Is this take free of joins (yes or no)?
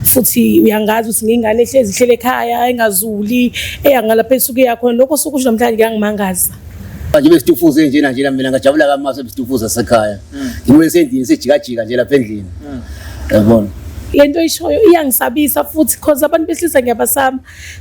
no